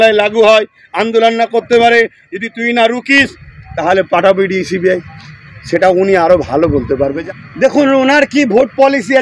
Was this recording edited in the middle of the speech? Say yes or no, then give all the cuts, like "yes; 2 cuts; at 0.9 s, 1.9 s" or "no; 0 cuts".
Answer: yes; 1 cut; at 7.1 s